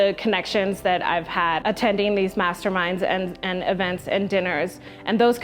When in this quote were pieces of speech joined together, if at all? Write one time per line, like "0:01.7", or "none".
0:01.6